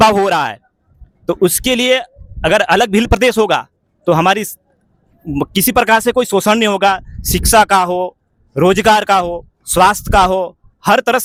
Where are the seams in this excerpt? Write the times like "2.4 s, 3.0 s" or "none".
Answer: none